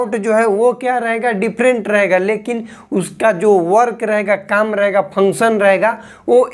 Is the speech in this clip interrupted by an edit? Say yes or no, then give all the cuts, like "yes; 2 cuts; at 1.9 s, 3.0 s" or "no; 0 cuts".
no; 0 cuts